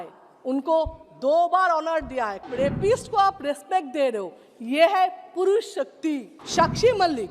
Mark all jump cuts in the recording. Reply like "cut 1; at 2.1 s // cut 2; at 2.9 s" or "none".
cut 1; at 2.5 s // cut 2; at 6.3 s